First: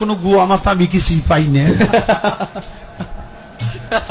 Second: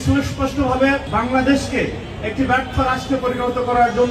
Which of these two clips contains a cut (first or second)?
second